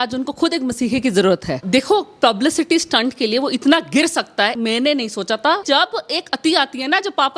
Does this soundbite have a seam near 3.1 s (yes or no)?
no